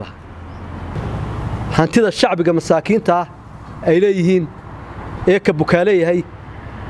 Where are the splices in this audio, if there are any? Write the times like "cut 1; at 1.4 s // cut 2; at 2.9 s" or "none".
cut 1; at 0.9 s